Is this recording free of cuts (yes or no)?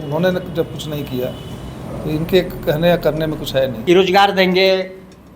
no